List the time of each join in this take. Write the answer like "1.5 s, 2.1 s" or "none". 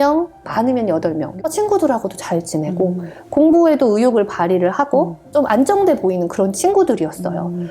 1.3 s